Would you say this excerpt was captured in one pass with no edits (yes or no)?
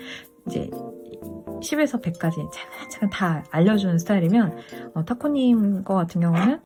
yes